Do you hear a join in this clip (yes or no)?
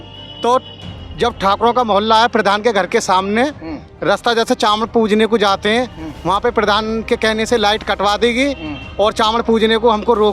no